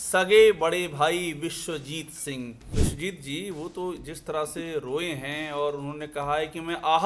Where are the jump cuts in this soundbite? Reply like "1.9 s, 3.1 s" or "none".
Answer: 2.6 s